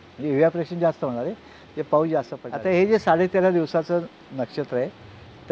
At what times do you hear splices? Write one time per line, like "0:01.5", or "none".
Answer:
0:02.4